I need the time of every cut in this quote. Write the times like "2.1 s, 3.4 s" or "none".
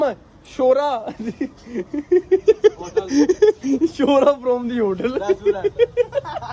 none